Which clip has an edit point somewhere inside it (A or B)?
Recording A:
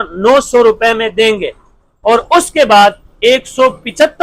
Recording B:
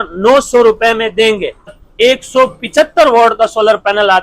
B